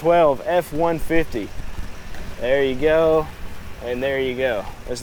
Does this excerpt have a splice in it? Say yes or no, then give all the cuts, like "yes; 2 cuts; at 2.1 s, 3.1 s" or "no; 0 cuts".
no; 0 cuts